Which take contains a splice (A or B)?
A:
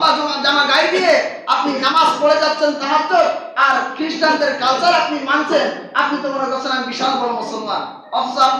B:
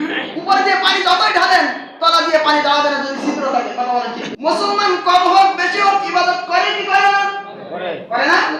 B